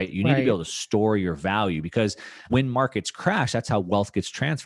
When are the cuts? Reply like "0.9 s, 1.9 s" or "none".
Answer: 2.5 s